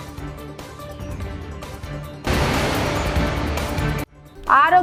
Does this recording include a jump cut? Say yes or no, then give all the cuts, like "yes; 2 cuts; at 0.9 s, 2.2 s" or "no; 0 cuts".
no; 0 cuts